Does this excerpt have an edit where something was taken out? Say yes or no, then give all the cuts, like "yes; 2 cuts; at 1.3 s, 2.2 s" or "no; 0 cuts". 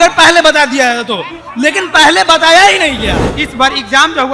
yes; 1 cut; at 3.3 s